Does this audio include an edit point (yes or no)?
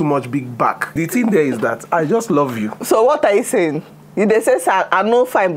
yes